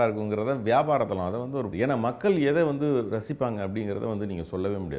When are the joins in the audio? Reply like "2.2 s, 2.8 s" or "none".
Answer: 1.7 s